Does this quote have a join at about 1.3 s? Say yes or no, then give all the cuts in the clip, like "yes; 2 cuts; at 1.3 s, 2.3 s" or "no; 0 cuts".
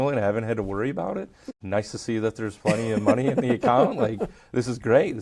yes; 1 cut; at 1.3 s